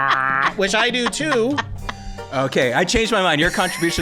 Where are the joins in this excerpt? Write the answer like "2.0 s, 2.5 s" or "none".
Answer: 2.3 s

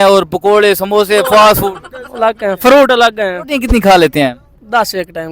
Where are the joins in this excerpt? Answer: 3.4 s

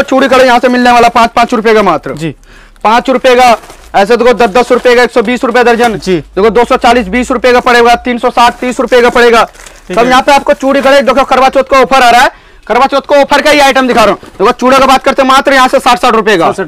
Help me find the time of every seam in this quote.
none

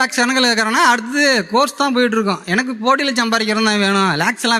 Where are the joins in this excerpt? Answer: none

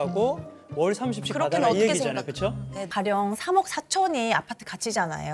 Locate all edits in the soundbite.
2.8 s

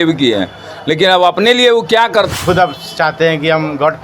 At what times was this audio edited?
2.3 s

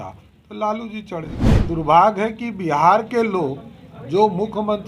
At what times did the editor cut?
1.4 s

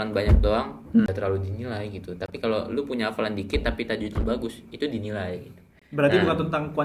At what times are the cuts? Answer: 1.1 s

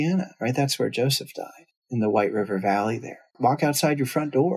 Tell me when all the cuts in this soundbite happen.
3.3 s

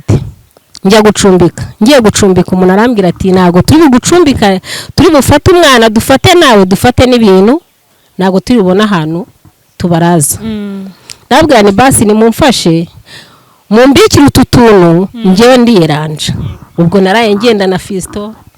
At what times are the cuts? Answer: none

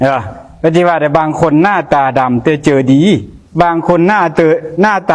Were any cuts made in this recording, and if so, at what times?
none

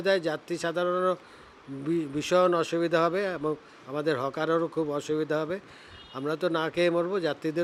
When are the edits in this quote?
none

